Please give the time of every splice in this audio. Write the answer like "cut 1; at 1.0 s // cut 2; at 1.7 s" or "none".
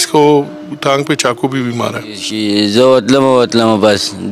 cut 1; at 2.3 s